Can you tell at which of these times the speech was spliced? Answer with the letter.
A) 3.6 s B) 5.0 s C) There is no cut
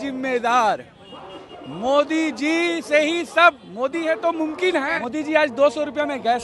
B